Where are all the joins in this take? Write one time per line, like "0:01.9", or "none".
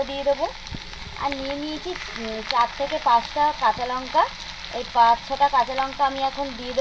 none